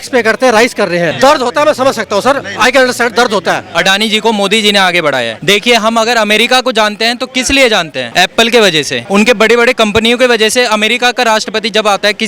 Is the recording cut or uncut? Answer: cut